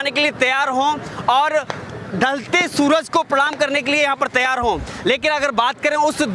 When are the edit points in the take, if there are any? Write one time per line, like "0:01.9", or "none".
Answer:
none